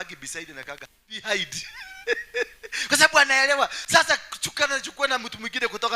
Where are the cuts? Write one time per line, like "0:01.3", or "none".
0:01.2